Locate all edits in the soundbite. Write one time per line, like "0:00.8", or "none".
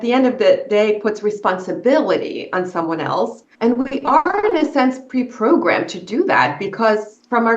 0:03.4